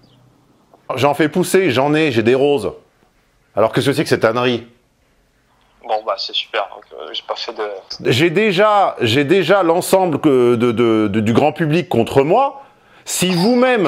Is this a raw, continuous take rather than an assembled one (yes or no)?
no